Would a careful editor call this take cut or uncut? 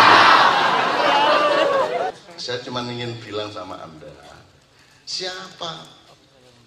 cut